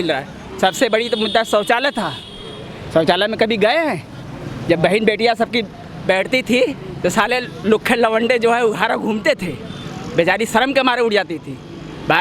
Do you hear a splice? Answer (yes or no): no